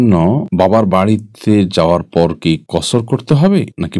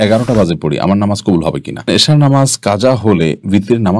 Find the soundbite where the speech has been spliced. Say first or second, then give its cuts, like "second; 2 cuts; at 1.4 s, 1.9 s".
second; 1 cut; at 1.9 s